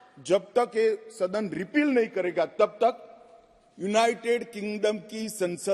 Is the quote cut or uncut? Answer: uncut